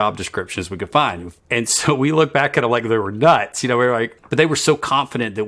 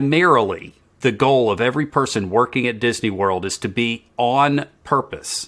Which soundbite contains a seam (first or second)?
first